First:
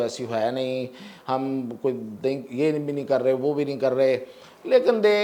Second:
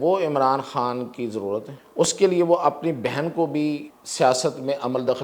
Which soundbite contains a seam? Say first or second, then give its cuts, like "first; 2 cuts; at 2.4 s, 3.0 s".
second; 2 cuts; at 1.8 s, 4.0 s